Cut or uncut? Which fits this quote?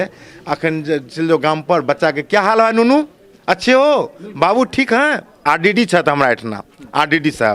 cut